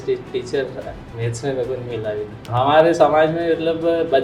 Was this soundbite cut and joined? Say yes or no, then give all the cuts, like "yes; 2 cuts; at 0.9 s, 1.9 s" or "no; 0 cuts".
yes; 1 cut; at 2.4 s